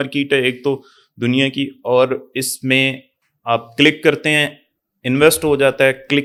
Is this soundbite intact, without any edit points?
yes; 0 cuts

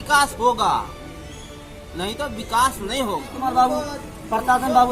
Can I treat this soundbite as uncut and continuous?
no; 1 cut; at 3.3 s

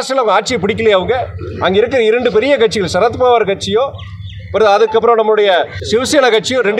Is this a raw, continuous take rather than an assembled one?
no; 1 cut; at 5.8 s

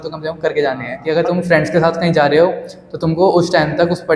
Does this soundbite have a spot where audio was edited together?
yes; 1 cut; at 0.9 s

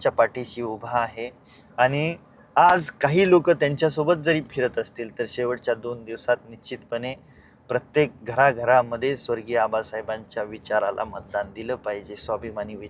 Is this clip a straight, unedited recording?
yes; 0 cuts

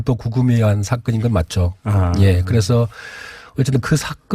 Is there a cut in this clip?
yes; 1 cut; at 1.8 s

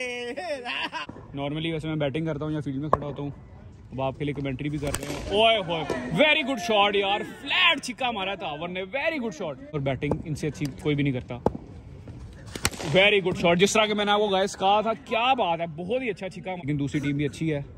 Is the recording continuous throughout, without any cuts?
no; 3 cuts; at 1.2 s, 9.8 s, 16.6 s

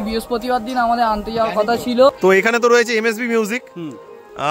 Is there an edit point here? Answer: yes; 1 cut; at 2.2 s

